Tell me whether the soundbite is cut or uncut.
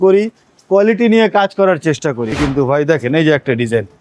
cut